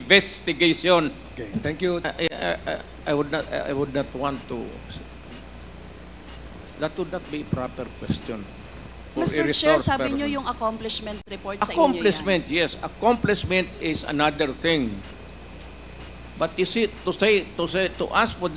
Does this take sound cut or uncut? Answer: cut